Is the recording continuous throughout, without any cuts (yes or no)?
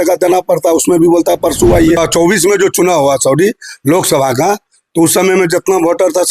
no